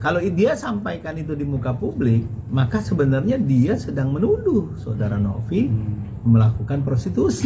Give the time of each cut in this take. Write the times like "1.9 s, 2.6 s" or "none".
none